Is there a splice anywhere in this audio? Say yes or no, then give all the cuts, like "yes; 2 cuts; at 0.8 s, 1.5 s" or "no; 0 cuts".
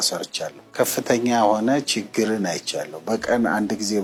no; 0 cuts